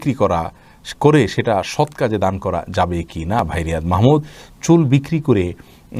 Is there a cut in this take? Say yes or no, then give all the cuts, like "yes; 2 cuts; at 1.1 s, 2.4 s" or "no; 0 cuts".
no; 0 cuts